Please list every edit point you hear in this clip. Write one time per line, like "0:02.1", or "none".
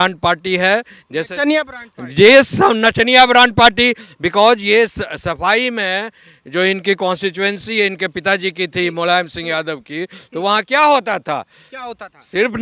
none